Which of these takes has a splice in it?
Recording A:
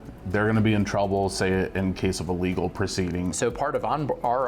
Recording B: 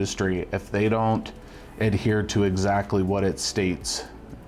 A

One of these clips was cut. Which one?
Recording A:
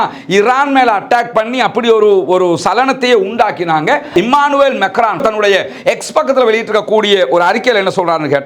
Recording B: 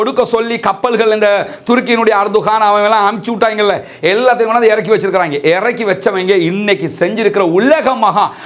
A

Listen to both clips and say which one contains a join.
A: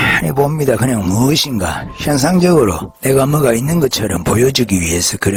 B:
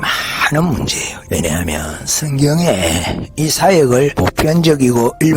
B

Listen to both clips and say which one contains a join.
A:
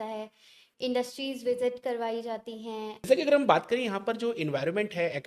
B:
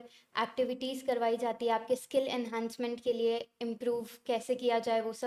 A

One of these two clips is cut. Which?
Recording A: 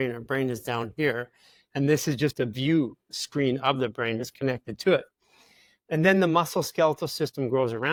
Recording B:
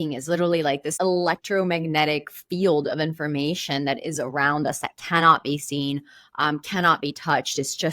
B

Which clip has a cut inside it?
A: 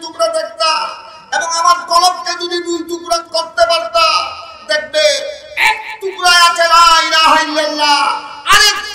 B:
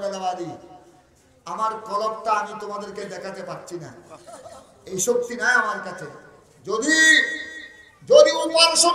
A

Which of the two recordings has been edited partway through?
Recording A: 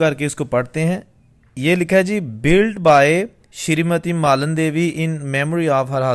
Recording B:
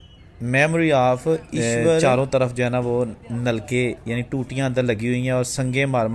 B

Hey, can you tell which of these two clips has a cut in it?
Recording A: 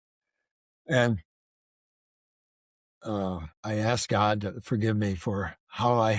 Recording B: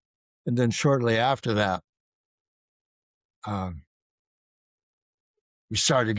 A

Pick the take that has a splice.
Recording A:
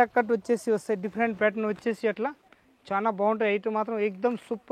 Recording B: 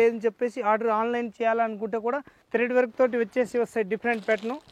B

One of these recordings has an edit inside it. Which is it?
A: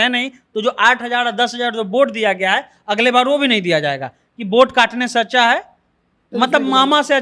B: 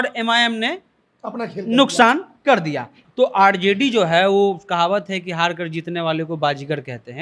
B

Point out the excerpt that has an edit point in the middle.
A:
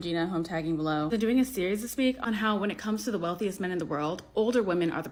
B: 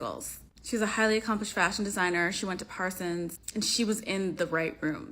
B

